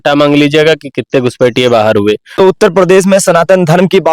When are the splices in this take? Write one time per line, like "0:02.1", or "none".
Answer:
0:02.4